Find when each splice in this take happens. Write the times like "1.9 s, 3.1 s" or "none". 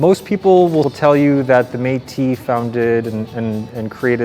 0.9 s